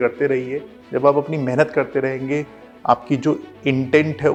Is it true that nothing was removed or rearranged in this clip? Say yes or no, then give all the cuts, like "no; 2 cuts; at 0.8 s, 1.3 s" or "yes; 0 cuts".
yes; 0 cuts